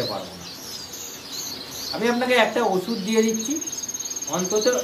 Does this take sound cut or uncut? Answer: uncut